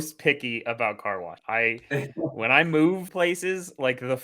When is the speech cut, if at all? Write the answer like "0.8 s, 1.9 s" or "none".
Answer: 1.3 s, 3.1 s